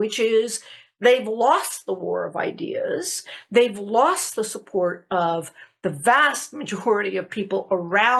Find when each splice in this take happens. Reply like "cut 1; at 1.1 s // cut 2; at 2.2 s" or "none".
none